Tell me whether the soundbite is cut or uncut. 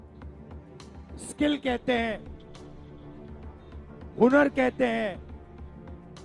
cut